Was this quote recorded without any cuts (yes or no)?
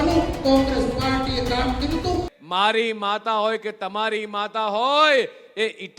no